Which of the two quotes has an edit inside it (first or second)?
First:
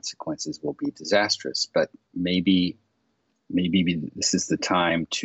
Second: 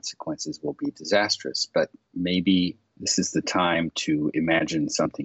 second